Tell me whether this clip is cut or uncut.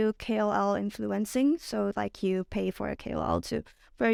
uncut